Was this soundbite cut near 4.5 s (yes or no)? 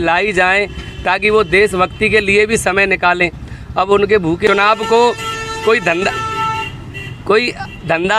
yes